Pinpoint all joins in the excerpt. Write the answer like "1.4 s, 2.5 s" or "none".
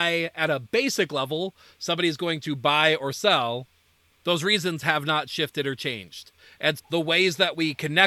none